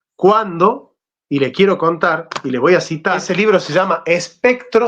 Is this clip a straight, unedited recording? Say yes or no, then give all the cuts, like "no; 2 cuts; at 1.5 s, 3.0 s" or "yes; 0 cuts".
no; 1 cut; at 3.3 s